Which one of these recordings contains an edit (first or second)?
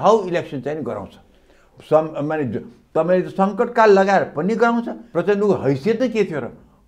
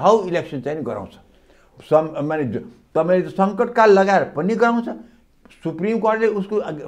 first